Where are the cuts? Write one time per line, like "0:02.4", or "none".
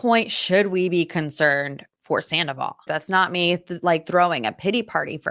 0:02.9